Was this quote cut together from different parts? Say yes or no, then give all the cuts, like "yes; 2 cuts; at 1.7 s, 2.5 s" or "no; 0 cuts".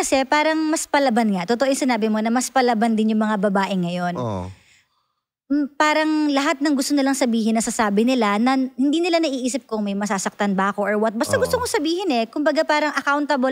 no; 0 cuts